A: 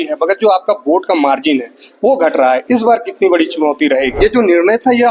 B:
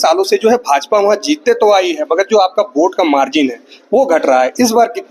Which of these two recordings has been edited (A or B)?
A